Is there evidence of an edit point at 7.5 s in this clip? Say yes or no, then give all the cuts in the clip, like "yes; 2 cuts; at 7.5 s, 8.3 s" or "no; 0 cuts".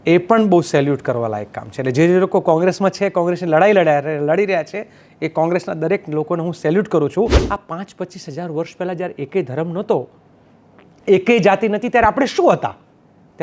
yes; 1 cut; at 7.5 s